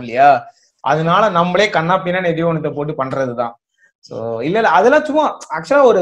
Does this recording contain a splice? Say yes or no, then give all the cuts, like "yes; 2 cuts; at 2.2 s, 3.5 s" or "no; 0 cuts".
no; 0 cuts